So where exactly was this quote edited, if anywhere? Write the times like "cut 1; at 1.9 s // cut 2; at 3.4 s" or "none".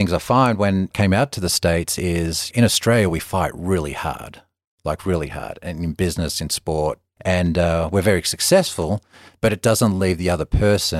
cut 1; at 0.9 s // cut 2; at 2.5 s // cut 3; at 7.1 s